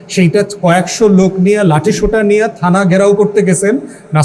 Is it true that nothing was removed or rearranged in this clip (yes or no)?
yes